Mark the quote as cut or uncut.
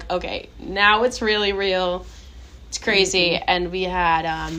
uncut